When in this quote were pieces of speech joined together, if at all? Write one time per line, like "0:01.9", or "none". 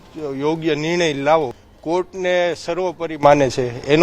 0:01.7